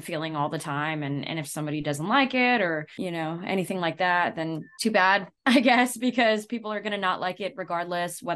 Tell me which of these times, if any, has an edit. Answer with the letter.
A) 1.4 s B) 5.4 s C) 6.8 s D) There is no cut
D